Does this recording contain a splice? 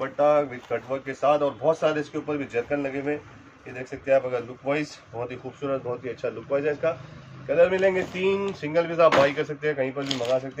no; 0 cuts

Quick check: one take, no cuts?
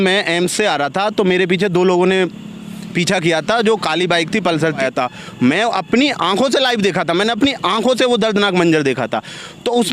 no; 1 cut; at 4.8 s

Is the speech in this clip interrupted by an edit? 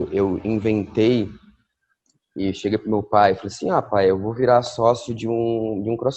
no; 0 cuts

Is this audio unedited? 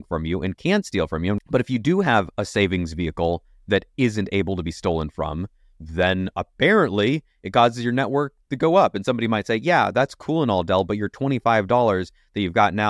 no; 1 cut; at 1.4 s

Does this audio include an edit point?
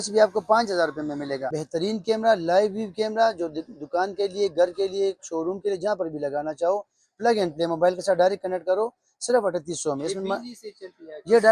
yes; 1 cut; at 1.5 s

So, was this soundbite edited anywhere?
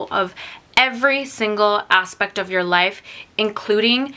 no; 0 cuts

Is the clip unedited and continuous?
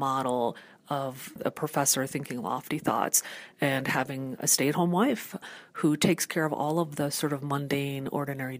no; 1 cut; at 5.4 s

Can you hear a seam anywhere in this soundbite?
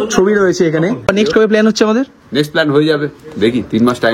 yes; 1 cut; at 1.1 s

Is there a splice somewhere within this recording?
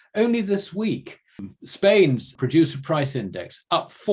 yes; 2 cuts; at 1.4 s, 2.3 s

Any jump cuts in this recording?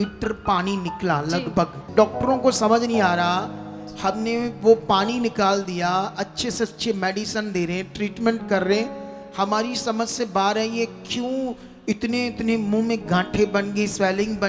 yes; 1 cut; at 1.9 s

